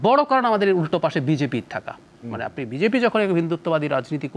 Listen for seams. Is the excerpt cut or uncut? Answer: uncut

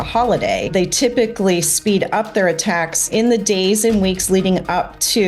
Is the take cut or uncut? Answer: cut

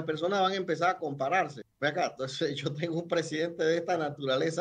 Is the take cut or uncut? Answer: cut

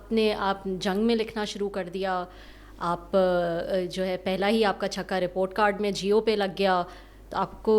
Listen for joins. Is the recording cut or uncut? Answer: uncut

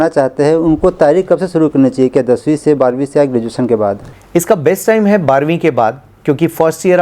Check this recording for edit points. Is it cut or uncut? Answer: uncut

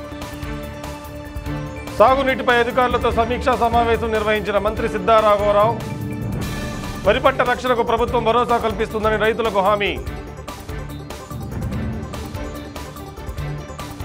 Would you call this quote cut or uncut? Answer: cut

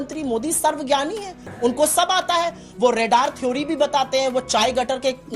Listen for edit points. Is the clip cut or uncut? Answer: cut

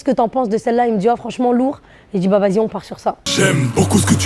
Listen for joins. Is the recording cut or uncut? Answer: cut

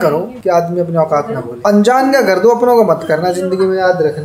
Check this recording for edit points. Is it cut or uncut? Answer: cut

